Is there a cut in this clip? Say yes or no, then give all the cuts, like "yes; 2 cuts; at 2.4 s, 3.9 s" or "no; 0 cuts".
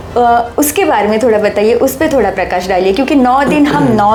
no; 0 cuts